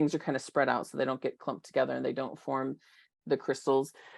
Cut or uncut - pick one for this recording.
uncut